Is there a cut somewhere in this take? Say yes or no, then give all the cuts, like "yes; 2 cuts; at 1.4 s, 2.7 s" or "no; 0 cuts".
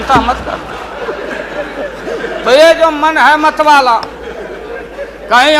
no; 0 cuts